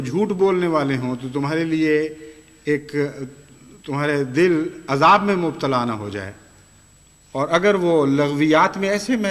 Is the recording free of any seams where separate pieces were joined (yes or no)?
yes